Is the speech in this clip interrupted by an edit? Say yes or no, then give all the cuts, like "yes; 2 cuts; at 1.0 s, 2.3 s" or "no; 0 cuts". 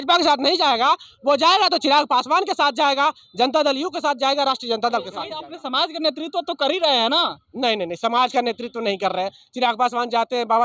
yes; 1 cut; at 5.4 s